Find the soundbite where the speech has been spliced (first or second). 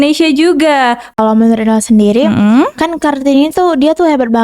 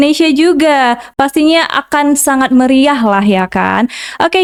first